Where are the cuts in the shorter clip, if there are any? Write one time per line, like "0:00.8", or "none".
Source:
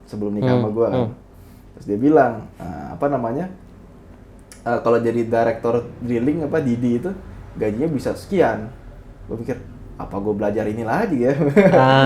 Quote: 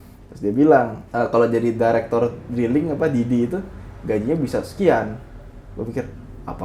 0:01.0